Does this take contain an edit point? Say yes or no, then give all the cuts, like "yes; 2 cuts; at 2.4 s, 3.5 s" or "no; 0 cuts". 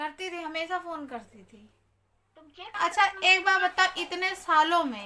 yes; 1 cut; at 2.7 s